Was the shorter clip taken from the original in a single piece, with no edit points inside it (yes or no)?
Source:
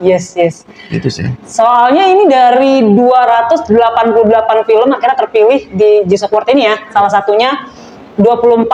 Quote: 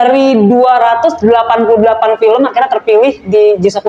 yes